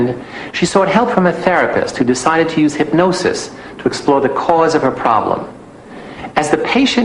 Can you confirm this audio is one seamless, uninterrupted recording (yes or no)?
no